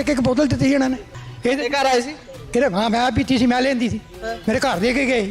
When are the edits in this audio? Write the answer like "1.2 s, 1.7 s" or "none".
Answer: 1.1 s